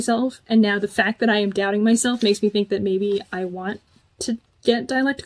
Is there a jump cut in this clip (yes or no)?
no